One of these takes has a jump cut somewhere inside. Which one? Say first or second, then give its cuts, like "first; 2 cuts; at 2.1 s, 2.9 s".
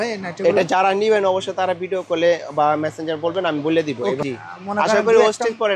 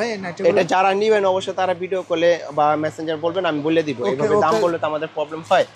first; 1 cut; at 4.2 s